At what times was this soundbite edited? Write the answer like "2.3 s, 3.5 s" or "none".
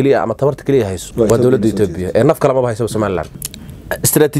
1.0 s, 3.3 s